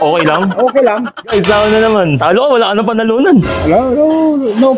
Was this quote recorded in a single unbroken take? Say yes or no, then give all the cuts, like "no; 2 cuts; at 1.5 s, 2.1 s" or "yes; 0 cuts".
no; 1 cut; at 1.3 s